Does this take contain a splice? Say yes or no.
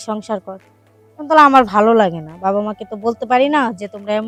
no